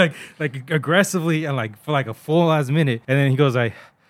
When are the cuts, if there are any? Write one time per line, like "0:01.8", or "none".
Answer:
0:03.0